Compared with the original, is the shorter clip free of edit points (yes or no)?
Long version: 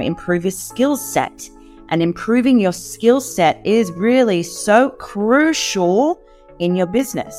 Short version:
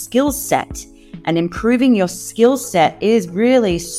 yes